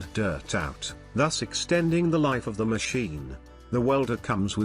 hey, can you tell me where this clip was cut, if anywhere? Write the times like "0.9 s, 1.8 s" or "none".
3.3 s